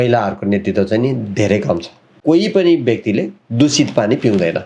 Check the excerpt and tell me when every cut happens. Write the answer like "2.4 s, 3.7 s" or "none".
2.2 s